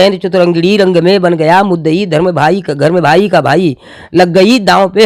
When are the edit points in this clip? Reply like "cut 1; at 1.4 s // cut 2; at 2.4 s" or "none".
none